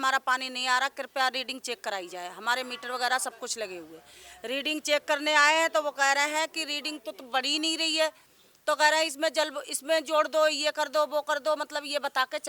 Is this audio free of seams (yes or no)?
yes